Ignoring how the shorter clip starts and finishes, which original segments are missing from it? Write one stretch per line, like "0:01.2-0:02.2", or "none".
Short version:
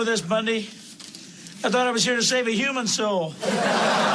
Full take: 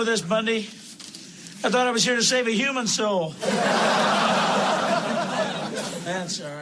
none

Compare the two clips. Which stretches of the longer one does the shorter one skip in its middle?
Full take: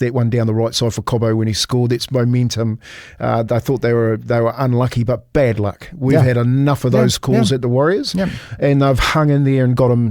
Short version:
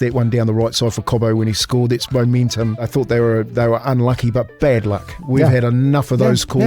0:02.9-0:03.6

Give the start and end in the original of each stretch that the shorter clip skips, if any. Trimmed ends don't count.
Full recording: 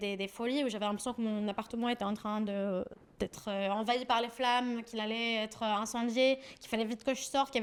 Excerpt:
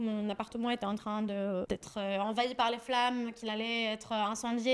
0:02.8-0:03.2

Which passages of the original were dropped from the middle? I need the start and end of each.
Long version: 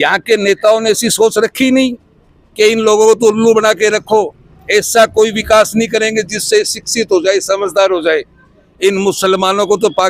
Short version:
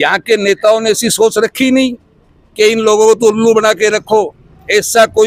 none

